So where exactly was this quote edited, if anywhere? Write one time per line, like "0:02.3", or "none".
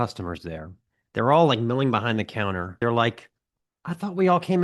0:02.8